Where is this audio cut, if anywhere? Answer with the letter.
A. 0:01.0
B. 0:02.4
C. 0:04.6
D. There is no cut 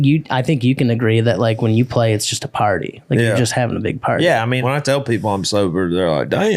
C